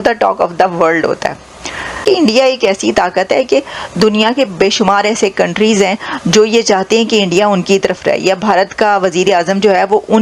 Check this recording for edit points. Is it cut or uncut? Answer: cut